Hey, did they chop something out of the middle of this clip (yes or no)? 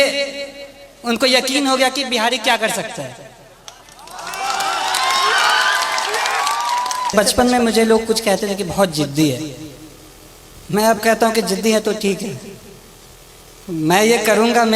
yes